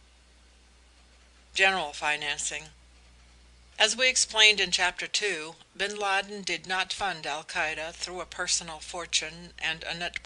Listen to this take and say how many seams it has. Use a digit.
1